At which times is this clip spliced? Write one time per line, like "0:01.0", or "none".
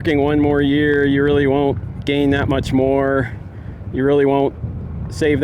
none